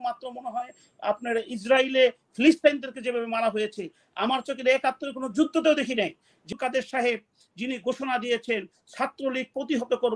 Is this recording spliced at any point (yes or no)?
yes